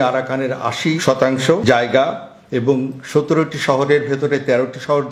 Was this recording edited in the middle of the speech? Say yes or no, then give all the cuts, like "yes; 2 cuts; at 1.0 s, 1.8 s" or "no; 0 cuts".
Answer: yes; 1 cut; at 1.0 s